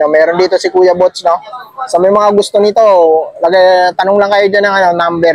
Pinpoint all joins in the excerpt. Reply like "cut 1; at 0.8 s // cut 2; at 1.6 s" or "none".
none